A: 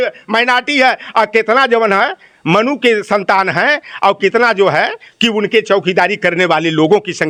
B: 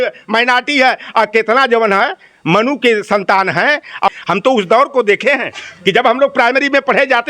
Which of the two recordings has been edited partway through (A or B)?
B